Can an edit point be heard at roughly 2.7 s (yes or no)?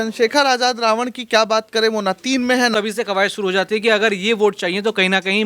yes